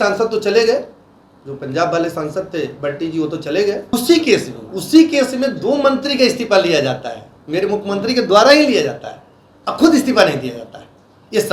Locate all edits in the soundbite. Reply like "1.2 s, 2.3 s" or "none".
3.9 s